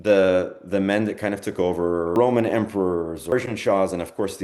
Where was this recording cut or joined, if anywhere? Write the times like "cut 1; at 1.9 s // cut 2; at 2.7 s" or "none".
cut 1; at 2.1 s // cut 2; at 3.3 s